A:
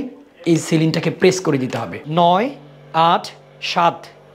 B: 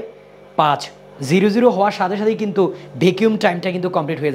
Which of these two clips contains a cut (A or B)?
A